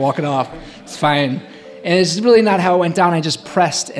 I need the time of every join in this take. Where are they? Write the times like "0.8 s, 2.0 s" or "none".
none